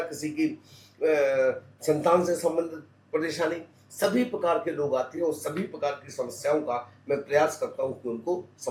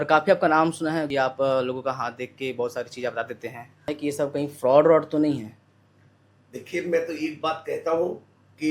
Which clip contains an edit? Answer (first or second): second